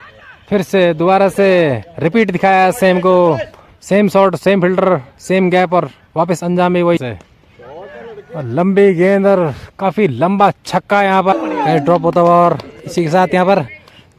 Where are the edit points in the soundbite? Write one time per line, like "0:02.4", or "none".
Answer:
0:07.0
0:11.3